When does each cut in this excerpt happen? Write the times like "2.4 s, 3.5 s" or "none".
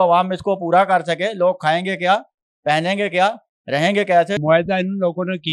4.4 s